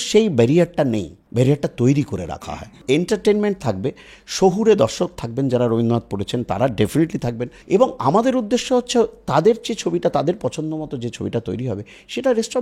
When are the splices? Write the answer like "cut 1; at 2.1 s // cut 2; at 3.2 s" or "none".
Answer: cut 1; at 1.2 s // cut 2; at 2.3 s // cut 3; at 7.5 s